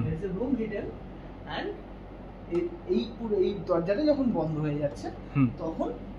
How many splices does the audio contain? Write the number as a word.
zero